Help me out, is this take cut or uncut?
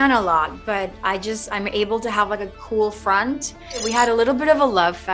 cut